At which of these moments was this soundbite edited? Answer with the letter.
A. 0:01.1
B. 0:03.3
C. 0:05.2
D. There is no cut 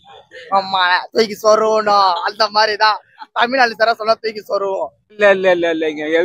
C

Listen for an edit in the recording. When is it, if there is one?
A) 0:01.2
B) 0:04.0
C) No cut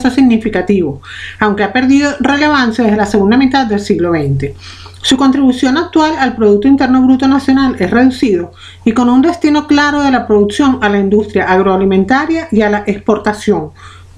C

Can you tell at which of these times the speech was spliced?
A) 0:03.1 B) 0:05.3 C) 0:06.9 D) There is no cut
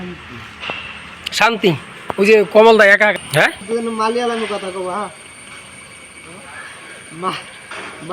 A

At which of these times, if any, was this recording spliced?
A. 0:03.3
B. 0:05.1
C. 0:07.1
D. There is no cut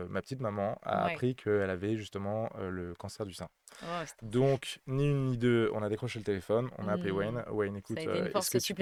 D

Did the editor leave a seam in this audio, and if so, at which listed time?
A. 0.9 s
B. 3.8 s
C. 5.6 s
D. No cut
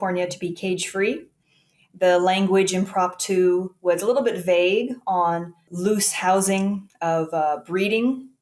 C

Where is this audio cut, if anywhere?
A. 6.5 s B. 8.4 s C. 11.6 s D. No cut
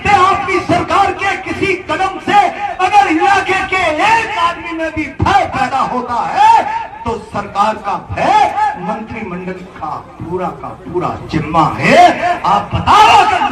D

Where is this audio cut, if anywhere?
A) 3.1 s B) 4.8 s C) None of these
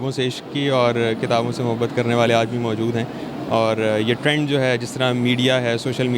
C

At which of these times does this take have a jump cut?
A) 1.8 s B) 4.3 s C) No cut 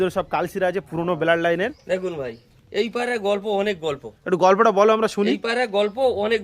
A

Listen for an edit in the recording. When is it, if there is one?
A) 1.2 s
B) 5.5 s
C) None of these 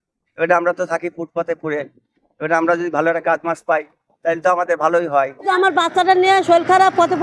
B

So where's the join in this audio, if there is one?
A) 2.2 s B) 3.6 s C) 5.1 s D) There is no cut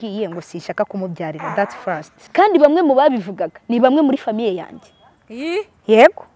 A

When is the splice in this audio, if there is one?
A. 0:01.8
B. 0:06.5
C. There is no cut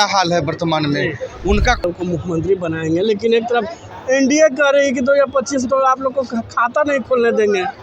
A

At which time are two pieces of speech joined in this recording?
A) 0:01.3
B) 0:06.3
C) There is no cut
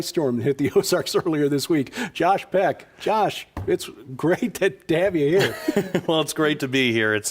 A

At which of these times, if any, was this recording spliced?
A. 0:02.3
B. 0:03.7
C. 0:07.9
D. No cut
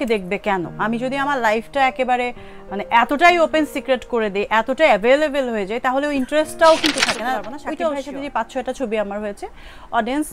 C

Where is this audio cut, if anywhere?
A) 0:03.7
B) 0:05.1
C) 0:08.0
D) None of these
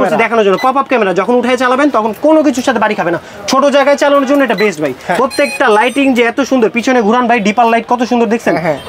B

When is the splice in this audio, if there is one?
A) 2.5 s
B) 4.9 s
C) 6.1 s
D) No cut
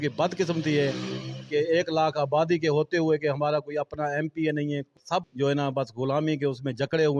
B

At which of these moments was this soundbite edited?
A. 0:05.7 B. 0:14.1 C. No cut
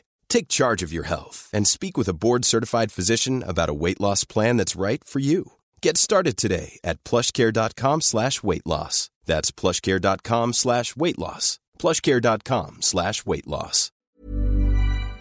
B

